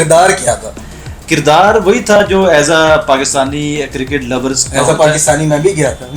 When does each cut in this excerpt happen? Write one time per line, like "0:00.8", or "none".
none